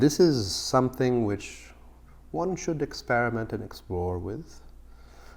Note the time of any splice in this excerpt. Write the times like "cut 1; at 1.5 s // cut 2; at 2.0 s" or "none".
none